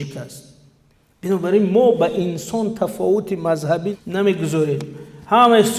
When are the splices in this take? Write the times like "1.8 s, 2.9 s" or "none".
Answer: 4.0 s